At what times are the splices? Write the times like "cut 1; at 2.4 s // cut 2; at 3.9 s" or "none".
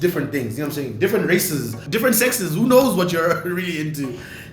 cut 1; at 1.8 s

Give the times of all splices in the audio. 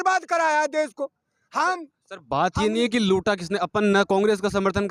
none

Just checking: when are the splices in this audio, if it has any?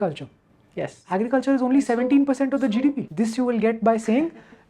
cut 1; at 3.0 s

